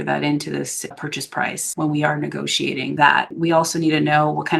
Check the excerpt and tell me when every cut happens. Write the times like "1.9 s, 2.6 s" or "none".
1.6 s, 3.2 s